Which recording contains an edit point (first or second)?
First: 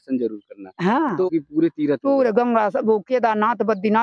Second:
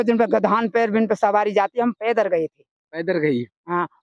first